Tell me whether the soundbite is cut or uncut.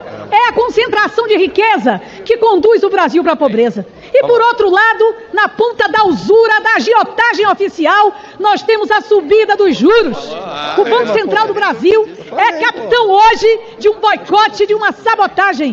uncut